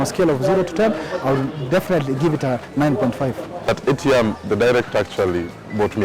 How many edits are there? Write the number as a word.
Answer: one